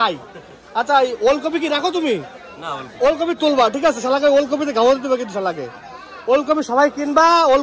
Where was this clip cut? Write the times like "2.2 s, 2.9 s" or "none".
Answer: none